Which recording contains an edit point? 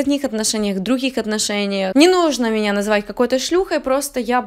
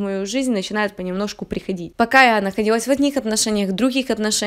second; 1 cut; at 1.9 s

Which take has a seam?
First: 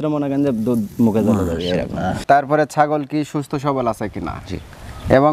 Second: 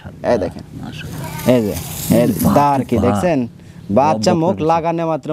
first; 1 cut; at 2.2 s

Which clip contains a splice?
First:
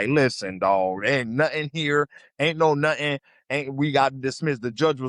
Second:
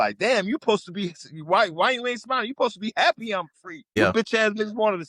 second; 1 cut; at 3.9 s

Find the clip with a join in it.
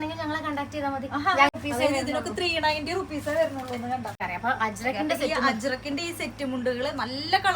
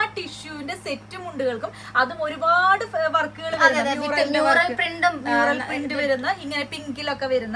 first; 2 cuts; at 1.5 s, 4.2 s

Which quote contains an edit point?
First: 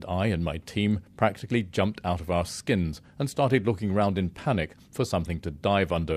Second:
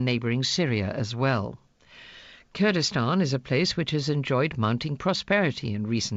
second; 1 cut; at 1.1 s

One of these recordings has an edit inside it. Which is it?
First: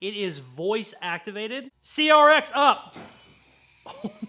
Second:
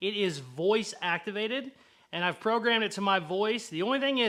first; 1 cut; at 1.8 s

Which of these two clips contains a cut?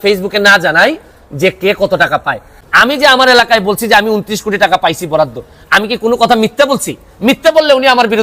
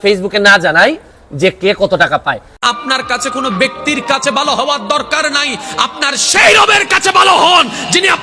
first; 1 cut; at 2.6 s

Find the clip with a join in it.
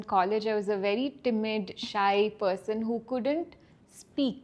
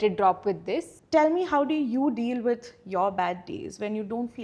second; 1 cut; at 0.9 s

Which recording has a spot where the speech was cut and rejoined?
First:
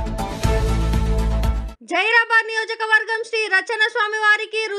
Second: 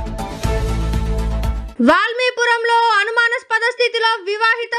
first; 1 cut; at 1.6 s

